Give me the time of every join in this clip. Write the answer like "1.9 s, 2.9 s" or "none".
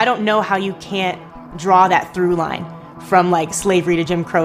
none